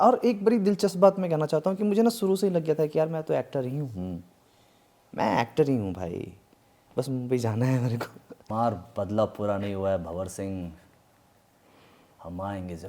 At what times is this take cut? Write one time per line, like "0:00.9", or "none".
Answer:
0:08.3